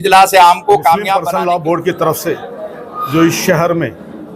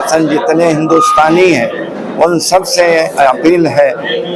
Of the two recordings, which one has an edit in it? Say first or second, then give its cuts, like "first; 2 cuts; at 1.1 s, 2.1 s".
first; 1 cut; at 1.2 s